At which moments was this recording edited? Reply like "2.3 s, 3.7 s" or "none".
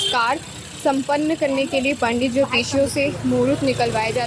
none